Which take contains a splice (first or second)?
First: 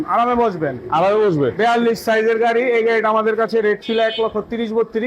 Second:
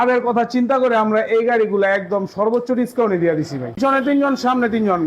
second